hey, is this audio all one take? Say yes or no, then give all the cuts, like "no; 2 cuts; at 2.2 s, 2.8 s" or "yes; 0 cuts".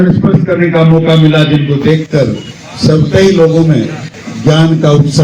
yes; 0 cuts